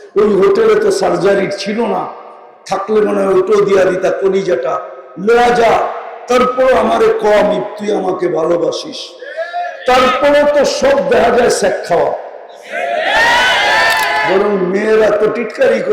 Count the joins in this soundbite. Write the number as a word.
one